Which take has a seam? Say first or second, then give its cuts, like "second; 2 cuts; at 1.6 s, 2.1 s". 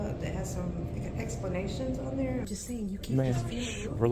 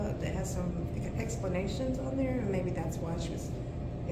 first; 1 cut; at 2.5 s